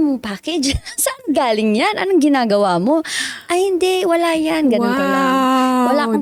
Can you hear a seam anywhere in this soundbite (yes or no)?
no